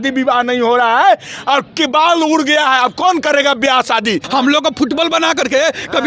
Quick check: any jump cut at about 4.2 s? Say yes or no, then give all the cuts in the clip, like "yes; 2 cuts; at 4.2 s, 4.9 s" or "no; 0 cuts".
yes; 1 cut; at 4.2 s